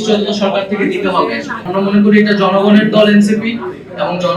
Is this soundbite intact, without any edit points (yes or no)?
no